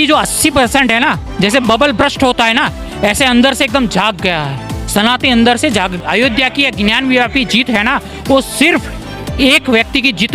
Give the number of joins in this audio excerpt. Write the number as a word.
one